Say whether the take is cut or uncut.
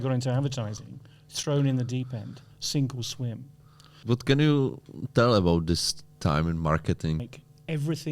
cut